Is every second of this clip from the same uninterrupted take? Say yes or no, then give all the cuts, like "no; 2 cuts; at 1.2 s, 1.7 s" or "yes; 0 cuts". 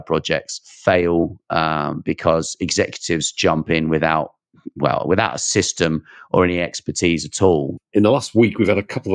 no; 1 cut; at 7.8 s